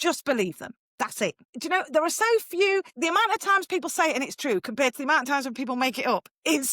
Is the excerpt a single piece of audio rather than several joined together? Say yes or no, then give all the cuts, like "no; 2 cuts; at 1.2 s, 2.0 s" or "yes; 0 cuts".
no; 2 cuts; at 1.5 s, 2.9 s